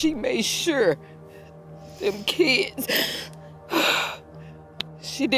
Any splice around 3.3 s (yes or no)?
no